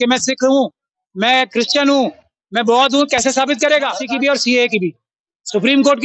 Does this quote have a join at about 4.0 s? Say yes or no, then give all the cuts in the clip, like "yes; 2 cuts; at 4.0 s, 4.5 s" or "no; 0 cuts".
yes; 1 cut; at 4.0 s